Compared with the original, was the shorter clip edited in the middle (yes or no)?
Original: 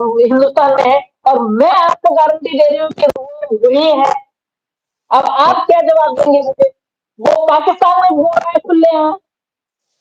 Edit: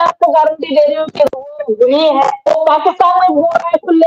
yes